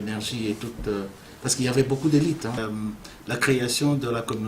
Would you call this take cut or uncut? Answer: cut